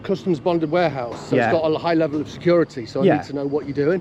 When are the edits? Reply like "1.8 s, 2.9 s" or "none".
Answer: none